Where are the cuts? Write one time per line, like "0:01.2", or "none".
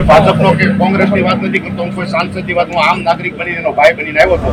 none